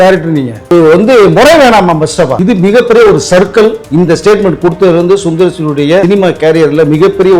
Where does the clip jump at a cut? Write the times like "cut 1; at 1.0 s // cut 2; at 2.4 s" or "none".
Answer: cut 1; at 0.7 s // cut 2; at 2.4 s // cut 3; at 3.8 s // cut 4; at 6.0 s